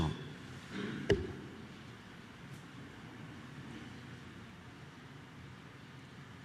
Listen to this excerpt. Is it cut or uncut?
cut